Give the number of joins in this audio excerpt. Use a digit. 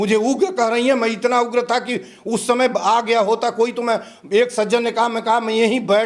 0